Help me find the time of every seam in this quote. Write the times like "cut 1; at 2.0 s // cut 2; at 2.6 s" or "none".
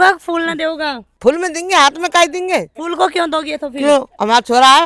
cut 1; at 2.7 s

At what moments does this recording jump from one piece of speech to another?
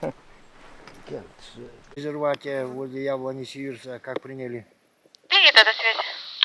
cut 1; at 1.8 s

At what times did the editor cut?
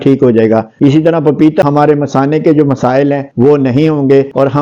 cut 1; at 1.6 s

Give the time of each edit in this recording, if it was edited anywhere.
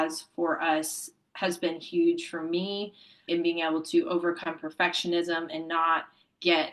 cut 1; at 3.2 s

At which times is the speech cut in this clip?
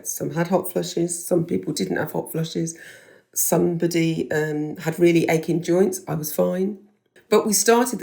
cut 1; at 7.1 s

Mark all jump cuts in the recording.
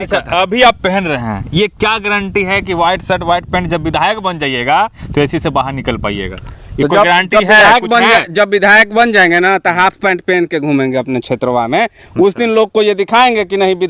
none

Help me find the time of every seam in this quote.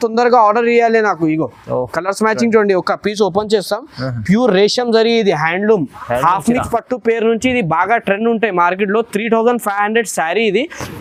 none

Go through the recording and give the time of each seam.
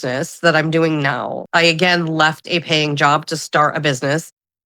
cut 1; at 1.4 s

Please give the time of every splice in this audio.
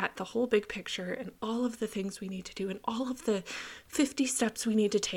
none

